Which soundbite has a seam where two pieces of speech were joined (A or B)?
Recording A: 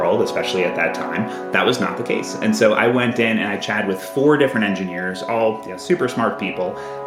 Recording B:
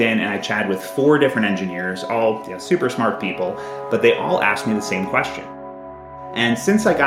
B